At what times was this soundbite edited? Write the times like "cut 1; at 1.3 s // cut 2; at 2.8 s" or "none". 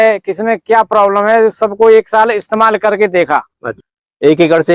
cut 1; at 3.6 s